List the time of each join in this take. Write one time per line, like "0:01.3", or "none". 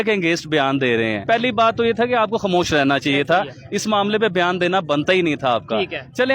0:01.2